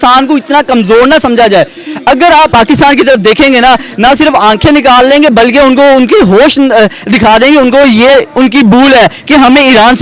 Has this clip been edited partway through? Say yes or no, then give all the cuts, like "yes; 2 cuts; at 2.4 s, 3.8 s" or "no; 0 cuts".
yes; 1 cut; at 2.5 s